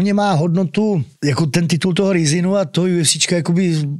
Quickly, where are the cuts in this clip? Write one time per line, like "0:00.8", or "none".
0:01.1